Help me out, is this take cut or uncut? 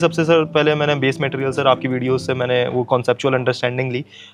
uncut